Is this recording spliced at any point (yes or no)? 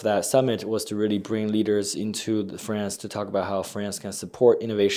no